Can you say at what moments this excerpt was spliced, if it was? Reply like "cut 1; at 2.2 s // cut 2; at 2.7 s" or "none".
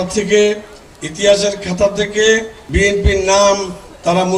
cut 1; at 2.6 s